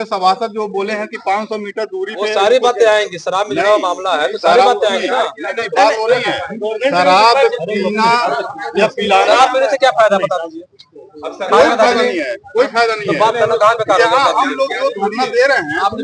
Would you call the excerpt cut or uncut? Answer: uncut